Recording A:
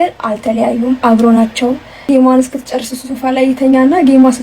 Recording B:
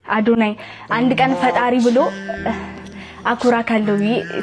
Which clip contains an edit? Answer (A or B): A